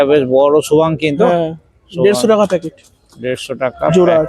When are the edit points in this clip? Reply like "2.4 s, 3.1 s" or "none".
none